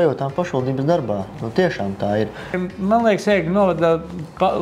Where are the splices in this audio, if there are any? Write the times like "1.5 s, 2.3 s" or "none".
2.6 s